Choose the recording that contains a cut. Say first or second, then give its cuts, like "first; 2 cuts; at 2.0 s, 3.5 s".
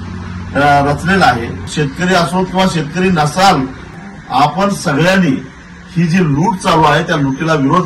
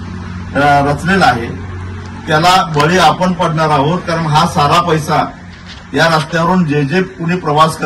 first; 2 cuts; at 1.7 s, 3.9 s